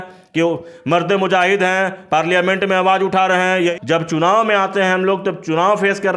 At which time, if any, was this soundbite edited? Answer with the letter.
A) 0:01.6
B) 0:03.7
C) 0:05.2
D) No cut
B